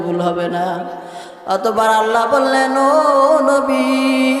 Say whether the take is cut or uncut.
uncut